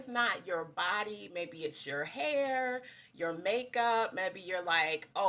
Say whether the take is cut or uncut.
uncut